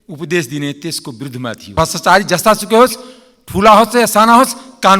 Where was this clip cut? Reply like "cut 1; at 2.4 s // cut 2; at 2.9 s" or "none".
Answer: cut 1; at 1.7 s